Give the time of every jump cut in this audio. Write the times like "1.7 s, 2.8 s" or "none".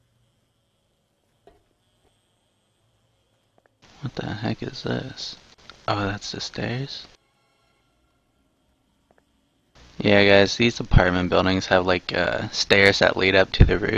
none